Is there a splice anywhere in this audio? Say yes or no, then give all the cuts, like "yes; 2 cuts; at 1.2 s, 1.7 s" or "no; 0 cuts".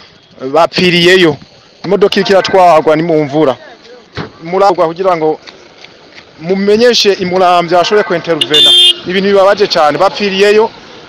no; 0 cuts